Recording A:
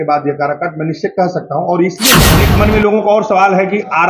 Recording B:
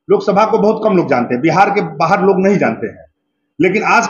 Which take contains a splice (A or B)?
A